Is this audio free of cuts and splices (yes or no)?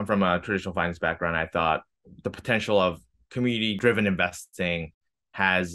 yes